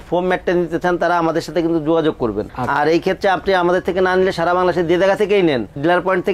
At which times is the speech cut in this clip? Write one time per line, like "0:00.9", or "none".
none